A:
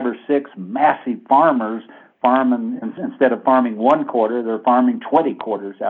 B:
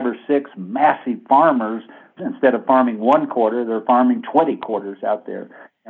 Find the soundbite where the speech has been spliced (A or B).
B